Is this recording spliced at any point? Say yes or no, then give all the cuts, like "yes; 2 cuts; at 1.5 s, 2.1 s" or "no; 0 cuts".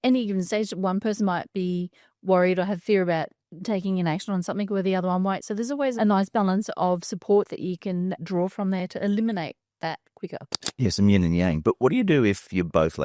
no; 0 cuts